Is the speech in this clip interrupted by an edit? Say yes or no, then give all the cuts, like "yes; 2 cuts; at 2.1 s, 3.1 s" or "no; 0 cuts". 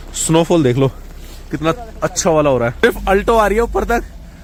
no; 0 cuts